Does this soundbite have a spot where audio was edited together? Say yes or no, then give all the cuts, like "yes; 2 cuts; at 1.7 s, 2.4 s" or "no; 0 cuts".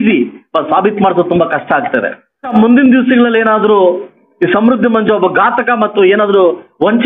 yes; 1 cut; at 2.5 s